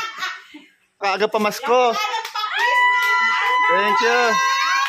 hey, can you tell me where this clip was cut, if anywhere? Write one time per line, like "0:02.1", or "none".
0:01.0